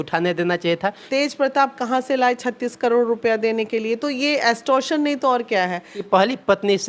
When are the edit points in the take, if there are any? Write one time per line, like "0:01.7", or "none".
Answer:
0:01.1
0:05.9